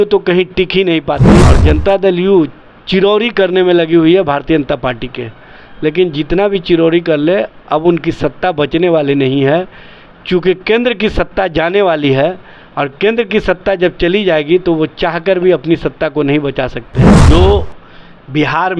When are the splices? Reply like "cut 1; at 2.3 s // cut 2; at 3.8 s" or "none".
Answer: cut 1; at 1.5 s // cut 2; at 17.2 s